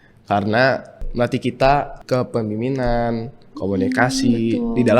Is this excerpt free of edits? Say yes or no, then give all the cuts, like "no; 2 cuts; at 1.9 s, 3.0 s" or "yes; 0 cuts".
no; 2 cuts; at 1.0 s, 2.0 s